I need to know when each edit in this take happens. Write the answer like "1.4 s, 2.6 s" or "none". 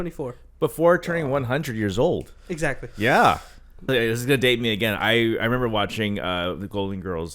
3.8 s

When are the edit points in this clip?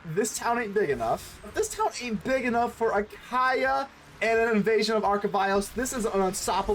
1.5 s

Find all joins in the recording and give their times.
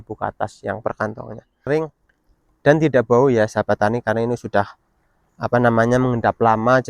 1.7 s

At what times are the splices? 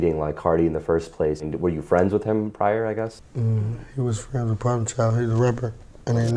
1.4 s, 3.2 s

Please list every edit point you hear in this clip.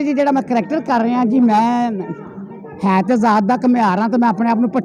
none

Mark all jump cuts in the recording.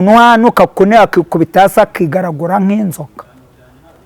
none

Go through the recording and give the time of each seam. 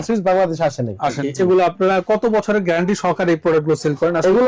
1.2 s

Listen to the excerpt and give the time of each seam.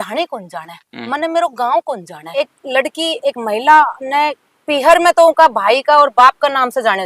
2.2 s

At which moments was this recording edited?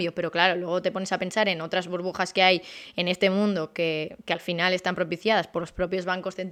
none

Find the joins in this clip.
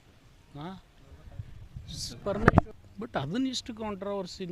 2.7 s

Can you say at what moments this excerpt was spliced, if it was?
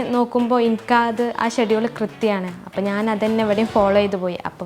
none

